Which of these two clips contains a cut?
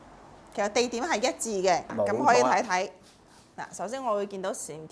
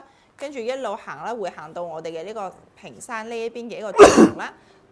first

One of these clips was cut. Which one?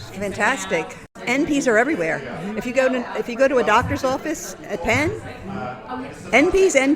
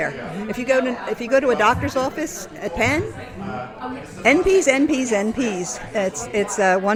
first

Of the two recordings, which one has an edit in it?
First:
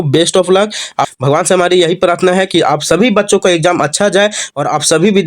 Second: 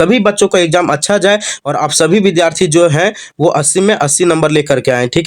first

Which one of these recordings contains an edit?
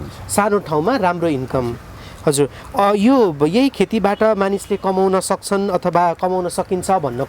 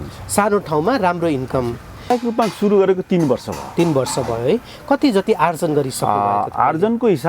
second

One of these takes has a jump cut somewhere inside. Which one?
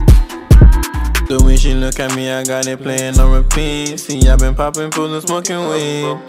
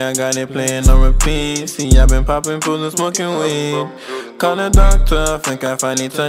first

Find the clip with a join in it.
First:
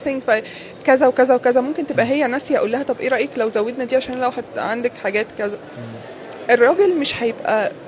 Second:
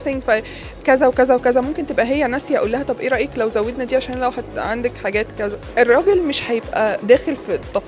second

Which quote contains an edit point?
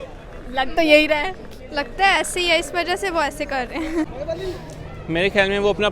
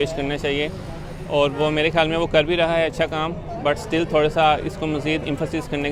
first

